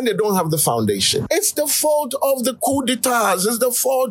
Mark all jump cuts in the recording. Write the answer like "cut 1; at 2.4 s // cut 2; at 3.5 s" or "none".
none